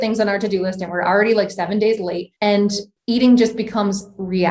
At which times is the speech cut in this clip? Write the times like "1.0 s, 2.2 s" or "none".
2.7 s